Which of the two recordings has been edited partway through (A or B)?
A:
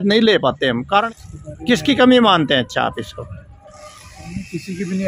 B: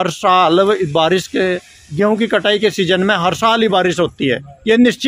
A